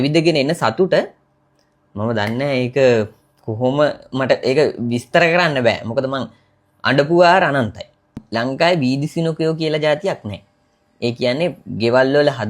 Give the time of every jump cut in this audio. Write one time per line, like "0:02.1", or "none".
0:08.2